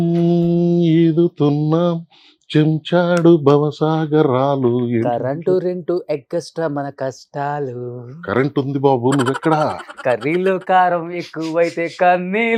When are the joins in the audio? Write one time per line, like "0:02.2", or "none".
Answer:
none